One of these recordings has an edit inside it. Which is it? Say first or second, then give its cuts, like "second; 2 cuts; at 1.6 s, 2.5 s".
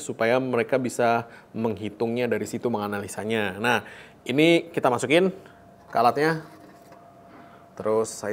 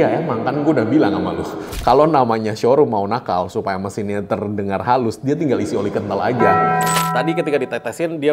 second; 1 cut; at 7.0 s